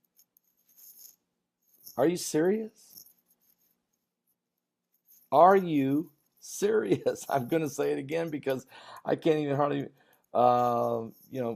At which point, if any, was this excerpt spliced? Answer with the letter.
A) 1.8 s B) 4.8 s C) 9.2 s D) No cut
D